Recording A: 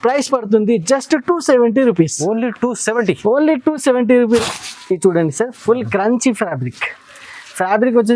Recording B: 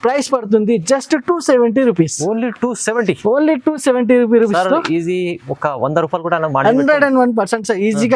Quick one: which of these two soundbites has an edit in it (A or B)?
A